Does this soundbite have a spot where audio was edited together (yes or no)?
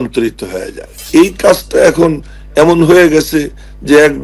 yes